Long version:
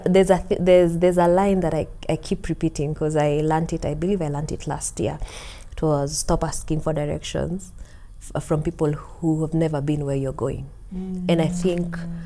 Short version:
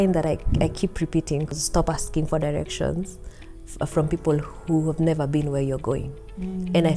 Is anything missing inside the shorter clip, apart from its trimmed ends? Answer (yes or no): yes